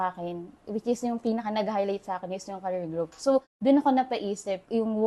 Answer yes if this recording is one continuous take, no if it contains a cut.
yes